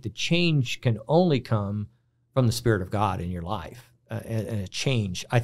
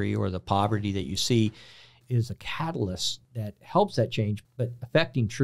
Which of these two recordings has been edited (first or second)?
second